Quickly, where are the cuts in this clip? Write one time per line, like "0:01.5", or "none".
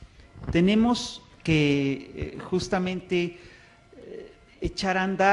0:03.4